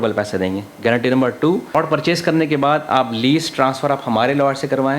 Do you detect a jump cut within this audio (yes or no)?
yes